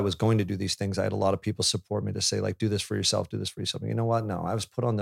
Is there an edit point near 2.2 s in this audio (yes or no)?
no